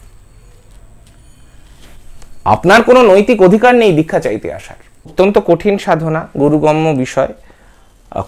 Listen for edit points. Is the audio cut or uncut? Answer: cut